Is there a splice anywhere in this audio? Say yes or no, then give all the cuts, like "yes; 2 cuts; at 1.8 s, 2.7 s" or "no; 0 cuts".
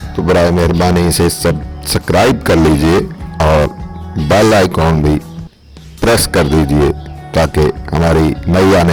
no; 0 cuts